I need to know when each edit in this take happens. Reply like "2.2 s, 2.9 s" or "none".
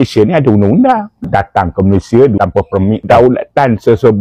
3.1 s